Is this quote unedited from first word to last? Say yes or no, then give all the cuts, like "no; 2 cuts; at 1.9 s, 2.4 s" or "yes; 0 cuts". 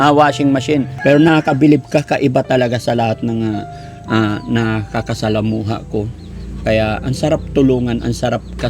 no; 1 cut; at 0.9 s